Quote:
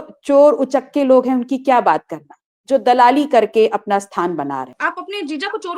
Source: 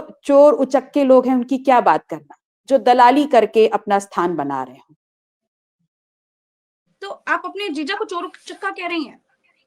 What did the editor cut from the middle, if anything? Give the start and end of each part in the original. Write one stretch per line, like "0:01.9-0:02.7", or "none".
0:04.7-0:07.2